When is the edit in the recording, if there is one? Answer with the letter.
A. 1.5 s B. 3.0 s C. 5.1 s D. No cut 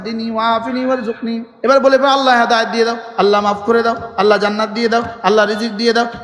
A